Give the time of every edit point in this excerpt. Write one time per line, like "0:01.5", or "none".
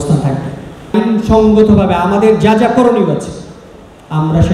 0:00.9

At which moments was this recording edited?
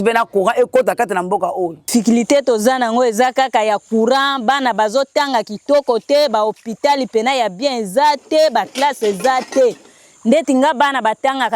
0:01.8

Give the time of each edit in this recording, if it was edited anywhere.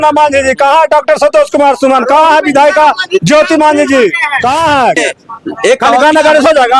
0:05.0

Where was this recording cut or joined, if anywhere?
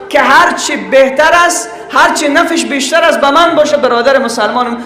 none

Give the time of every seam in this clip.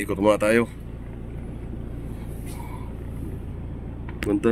none

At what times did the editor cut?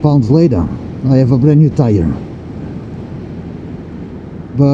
none

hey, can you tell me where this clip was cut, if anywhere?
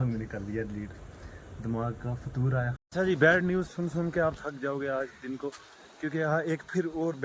0:02.8

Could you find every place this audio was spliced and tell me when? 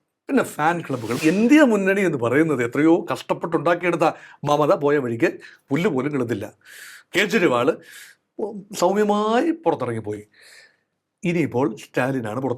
0:01.2

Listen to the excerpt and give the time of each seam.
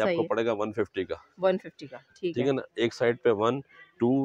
none

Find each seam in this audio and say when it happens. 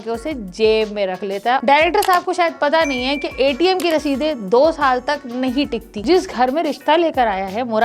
0:01.6
0:05.9

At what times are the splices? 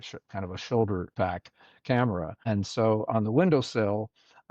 0:01.1
0:02.3

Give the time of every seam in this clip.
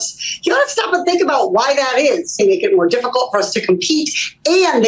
0:02.4

